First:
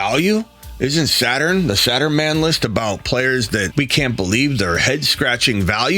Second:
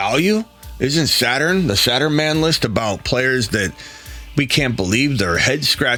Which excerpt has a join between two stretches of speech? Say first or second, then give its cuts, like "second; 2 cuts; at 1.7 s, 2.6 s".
first; 1 cut; at 3.7 s